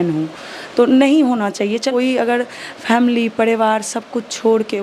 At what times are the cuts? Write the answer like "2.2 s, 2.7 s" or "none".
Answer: 1.9 s